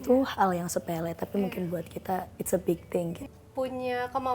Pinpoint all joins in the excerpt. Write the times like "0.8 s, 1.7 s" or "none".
3.2 s